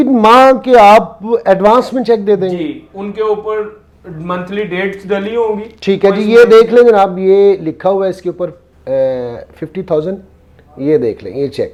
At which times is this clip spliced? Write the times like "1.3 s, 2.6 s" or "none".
none

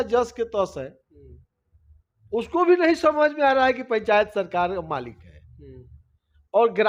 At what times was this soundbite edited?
none

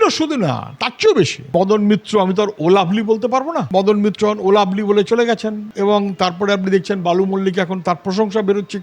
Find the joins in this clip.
1.5 s, 3.6 s

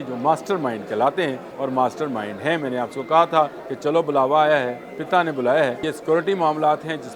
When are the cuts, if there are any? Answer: 1.5 s, 3.6 s, 5.8 s

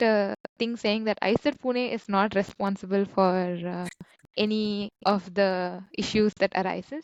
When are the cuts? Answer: none

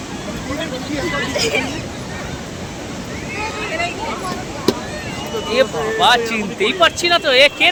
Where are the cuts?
none

